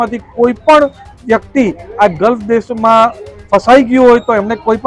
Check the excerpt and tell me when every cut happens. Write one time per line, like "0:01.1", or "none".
none